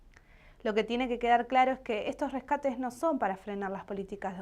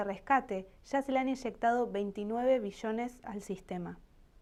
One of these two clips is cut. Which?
first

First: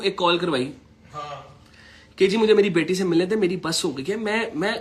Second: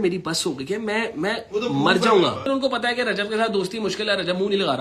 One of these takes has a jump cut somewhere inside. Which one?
second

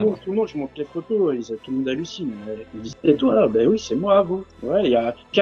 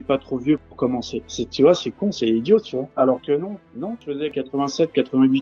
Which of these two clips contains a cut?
second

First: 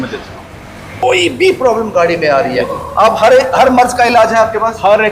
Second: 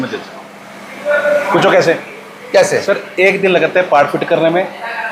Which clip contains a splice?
first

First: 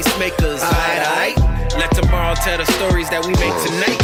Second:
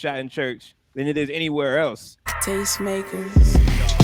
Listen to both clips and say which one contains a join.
second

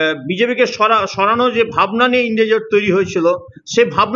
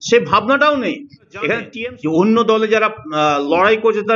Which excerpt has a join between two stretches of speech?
second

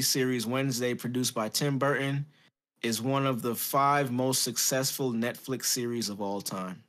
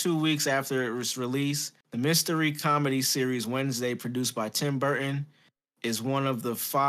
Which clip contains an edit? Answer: second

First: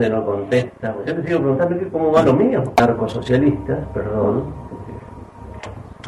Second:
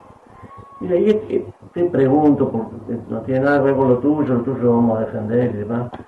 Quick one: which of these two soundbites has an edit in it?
first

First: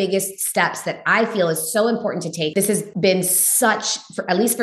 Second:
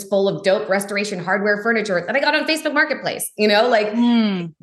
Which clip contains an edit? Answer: first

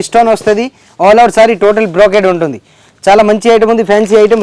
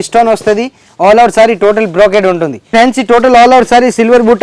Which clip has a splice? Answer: second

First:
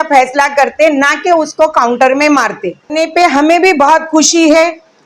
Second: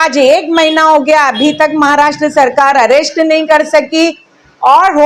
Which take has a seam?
first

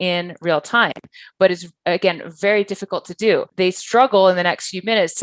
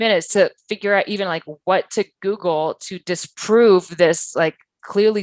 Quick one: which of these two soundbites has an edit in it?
first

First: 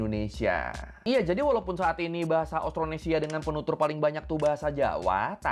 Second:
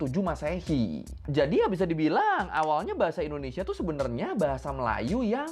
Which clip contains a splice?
second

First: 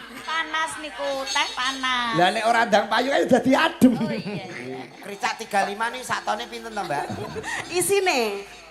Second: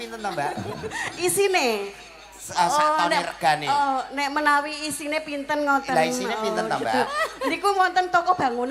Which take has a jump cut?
first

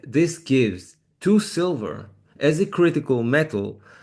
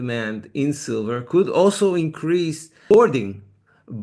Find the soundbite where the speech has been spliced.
second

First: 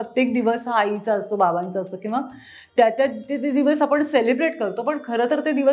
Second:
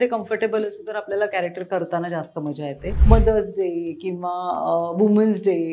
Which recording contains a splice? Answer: second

